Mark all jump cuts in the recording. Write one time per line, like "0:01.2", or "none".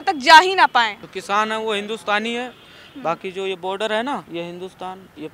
0:01.1
0:04.3